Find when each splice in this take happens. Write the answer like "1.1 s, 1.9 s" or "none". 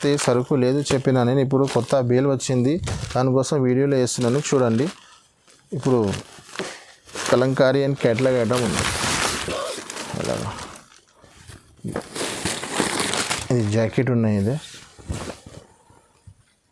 none